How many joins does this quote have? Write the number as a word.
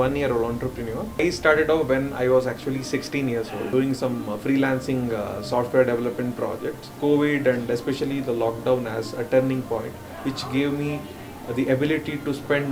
three